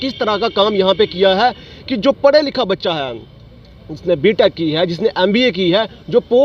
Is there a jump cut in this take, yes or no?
no